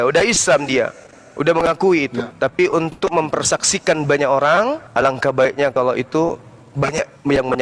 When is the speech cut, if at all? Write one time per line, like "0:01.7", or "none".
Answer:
0:02.2
0:04.8